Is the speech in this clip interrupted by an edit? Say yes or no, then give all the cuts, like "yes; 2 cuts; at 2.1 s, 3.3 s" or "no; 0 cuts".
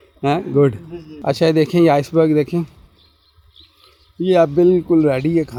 no; 0 cuts